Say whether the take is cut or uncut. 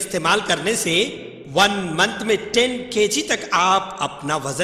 uncut